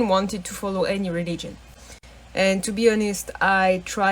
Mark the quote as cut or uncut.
cut